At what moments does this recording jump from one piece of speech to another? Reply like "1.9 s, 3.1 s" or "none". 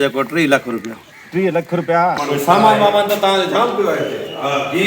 2.2 s